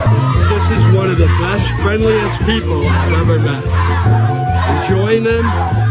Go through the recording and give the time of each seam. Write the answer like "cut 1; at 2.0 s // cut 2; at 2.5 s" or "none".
none